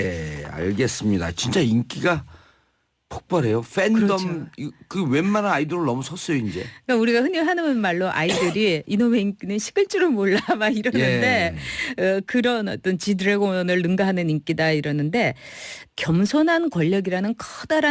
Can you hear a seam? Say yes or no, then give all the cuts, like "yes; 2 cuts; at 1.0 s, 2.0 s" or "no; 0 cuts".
no; 0 cuts